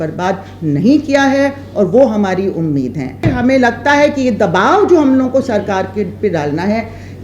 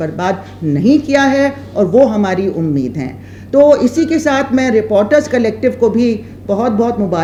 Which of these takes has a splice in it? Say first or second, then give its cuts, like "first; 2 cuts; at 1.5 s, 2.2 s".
first; 1 cut; at 3.3 s